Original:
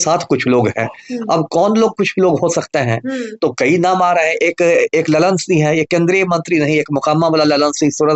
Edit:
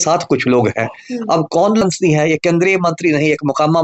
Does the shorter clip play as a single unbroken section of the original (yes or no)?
no